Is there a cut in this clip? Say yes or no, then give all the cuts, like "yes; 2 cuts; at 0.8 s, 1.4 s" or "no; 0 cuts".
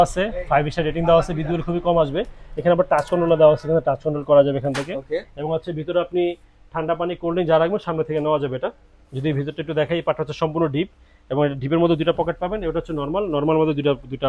no; 0 cuts